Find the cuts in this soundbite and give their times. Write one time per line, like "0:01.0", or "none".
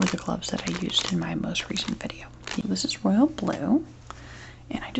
0:02.6